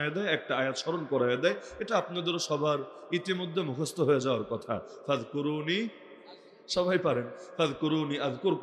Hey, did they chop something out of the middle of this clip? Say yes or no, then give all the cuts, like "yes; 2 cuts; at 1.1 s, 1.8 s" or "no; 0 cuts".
no; 0 cuts